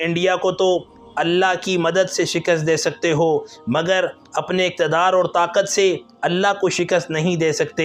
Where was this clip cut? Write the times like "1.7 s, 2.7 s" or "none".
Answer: none